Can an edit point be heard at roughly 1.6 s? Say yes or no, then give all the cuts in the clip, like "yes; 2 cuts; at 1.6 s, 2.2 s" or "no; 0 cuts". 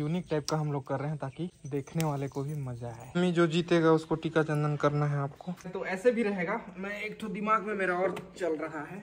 yes; 3 cuts; at 1.6 s, 3.0 s, 5.7 s